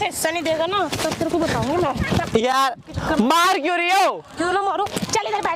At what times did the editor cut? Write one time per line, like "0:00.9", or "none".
none